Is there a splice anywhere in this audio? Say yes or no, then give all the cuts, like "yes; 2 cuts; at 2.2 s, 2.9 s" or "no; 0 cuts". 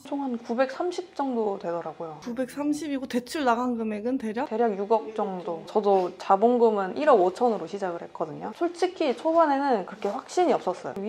no; 0 cuts